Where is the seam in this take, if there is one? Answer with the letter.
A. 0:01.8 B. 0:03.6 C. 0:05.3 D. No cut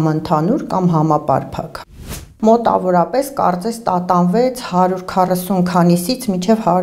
A